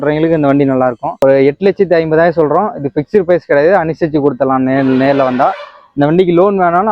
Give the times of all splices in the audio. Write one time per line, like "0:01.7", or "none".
0:01.1